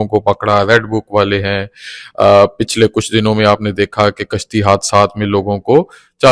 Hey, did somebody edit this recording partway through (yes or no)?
no